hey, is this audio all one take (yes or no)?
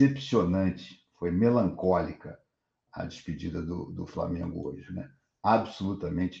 yes